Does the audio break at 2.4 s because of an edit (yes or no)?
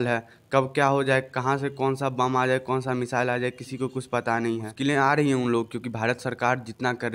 no